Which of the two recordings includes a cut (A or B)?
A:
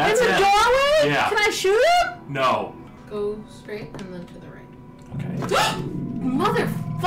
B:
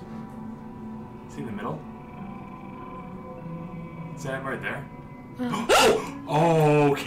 A